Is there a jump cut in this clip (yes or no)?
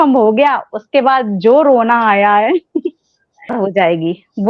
yes